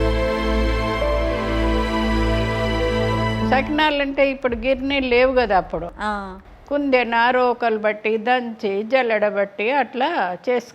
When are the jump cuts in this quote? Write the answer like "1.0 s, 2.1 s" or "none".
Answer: 3.5 s